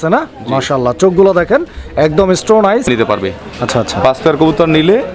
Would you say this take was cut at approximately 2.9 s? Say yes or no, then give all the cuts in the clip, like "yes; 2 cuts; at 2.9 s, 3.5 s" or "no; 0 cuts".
yes; 1 cut; at 2.9 s